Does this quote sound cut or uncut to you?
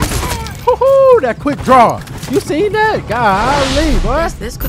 uncut